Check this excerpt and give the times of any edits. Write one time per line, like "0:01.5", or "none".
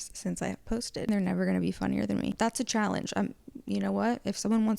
0:01.1
0:02.3